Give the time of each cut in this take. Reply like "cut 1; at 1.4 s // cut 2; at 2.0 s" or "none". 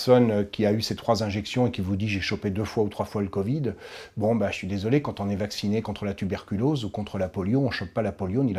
none